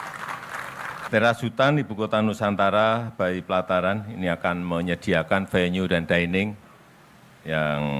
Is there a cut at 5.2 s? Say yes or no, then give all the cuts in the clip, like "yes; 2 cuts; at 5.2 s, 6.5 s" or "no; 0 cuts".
no; 1 cut; at 1.1 s